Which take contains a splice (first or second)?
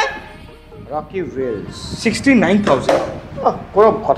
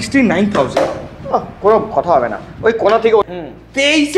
second